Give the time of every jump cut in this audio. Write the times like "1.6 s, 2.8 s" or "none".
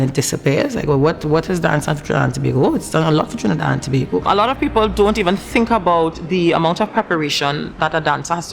4.2 s